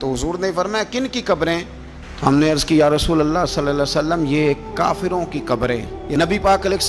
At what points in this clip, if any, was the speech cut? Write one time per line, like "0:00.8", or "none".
0:06.0